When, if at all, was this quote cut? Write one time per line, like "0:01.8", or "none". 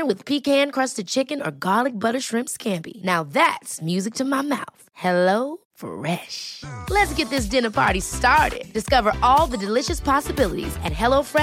none